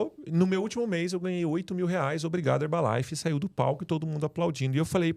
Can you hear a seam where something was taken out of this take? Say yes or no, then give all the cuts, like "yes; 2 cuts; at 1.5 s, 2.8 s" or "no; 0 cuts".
no; 0 cuts